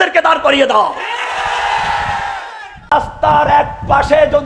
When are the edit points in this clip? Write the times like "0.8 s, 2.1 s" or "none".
2.9 s